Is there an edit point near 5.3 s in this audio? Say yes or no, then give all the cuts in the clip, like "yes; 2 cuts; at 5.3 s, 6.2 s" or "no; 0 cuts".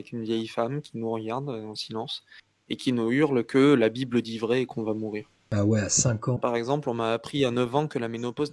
yes; 2 cuts; at 5.3 s, 6.4 s